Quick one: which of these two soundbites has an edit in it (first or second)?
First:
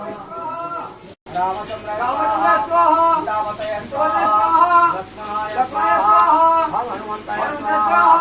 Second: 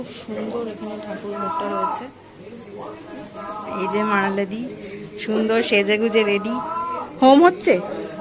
first